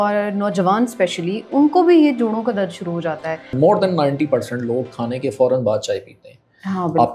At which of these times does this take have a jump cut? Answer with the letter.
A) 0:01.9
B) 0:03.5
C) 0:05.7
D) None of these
B